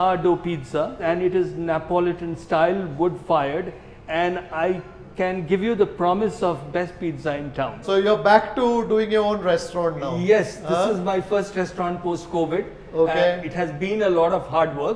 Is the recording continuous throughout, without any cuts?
yes; 0 cuts

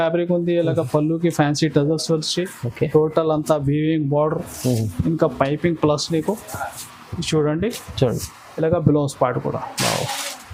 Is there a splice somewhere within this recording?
no; 0 cuts

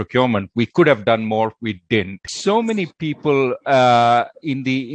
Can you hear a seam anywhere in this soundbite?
yes; 1 cut; at 2.3 s

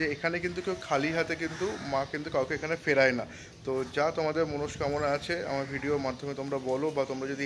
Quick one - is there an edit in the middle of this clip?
no; 0 cuts

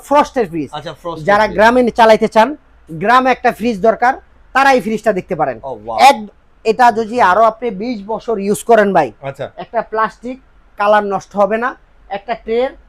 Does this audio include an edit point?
no; 0 cuts

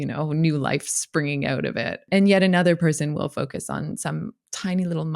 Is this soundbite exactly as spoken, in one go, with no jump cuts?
no; 1 cut; at 2.1 s

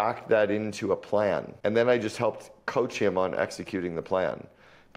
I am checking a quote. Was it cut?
yes; 1 cut; at 1.5 s

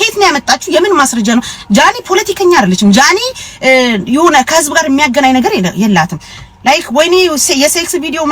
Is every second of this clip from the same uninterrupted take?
yes; 0 cuts

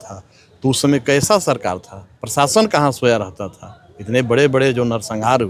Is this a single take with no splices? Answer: yes; 0 cuts

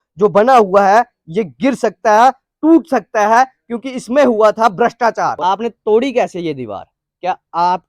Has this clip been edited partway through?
yes; 1 cut; at 5.4 s

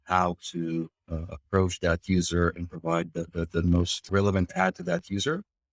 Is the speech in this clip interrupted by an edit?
yes; 1 cut; at 4.0 s

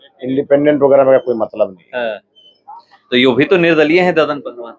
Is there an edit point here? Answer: no; 0 cuts

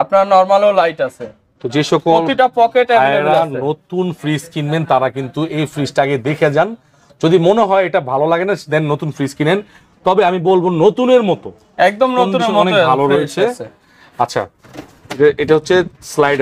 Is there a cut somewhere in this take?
no; 0 cuts

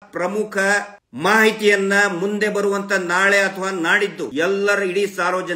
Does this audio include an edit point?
yes; 2 cuts; at 1.0 s, 4.3 s

